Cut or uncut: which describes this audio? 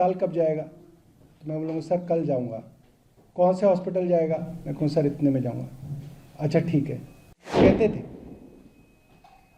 cut